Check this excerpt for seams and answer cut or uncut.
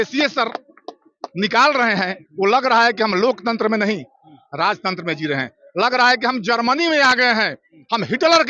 uncut